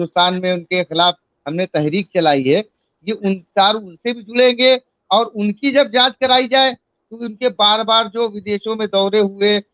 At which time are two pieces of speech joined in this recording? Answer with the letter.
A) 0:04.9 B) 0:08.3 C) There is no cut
C